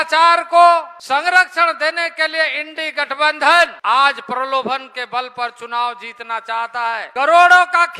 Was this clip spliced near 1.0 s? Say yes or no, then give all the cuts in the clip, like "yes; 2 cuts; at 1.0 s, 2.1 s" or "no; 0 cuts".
yes; 3 cuts; at 1.0 s, 3.8 s, 7.1 s